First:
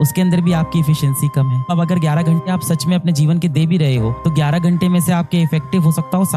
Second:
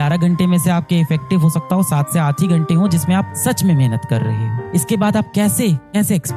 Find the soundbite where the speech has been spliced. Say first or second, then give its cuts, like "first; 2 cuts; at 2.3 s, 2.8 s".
first; 1 cut; at 1.7 s